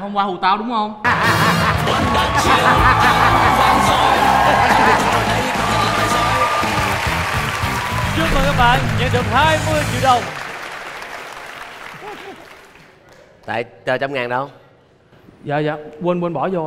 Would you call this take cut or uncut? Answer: cut